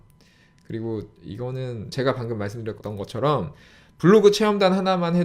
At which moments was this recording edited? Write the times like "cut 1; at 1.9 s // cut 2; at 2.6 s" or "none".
cut 1; at 1.9 s // cut 2; at 2.8 s